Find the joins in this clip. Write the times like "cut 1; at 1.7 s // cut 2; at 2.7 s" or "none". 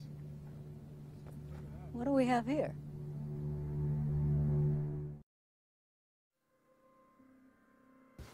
cut 1; at 1.8 s